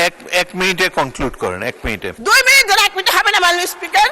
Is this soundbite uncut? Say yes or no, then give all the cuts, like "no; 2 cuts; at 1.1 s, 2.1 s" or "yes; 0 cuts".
no; 1 cut; at 2.2 s